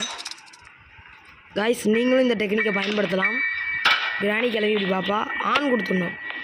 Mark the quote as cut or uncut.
uncut